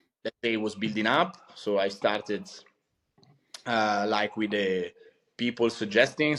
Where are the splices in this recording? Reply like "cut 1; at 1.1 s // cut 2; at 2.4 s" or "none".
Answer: none